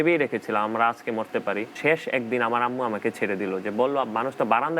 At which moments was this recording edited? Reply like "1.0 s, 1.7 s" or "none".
1.7 s